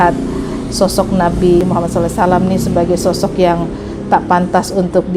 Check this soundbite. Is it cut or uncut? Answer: cut